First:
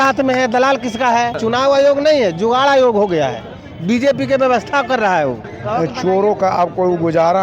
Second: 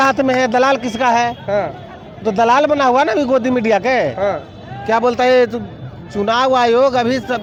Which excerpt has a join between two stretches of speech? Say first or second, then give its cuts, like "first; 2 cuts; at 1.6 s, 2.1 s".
first; 2 cuts; at 1.4 s, 5.5 s